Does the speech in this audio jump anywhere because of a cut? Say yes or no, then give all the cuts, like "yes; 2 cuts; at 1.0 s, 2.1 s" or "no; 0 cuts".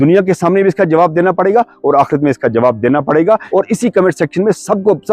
yes; 1 cut; at 3.4 s